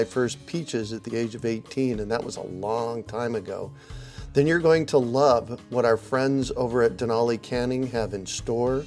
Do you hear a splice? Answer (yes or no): no